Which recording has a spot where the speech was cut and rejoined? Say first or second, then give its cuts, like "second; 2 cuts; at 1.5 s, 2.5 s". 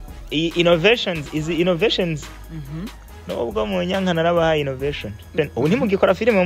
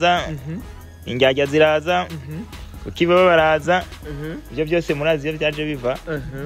first; 1 cut; at 5.3 s